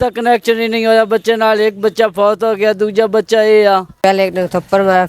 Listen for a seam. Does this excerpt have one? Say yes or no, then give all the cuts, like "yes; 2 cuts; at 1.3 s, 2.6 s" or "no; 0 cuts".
yes; 1 cut; at 3.9 s